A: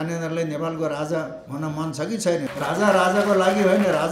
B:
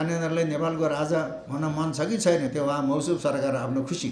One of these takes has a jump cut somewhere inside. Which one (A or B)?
A